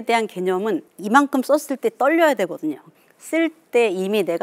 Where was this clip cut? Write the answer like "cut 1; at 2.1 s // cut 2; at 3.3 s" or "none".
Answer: cut 1; at 0.9 s // cut 2; at 2.9 s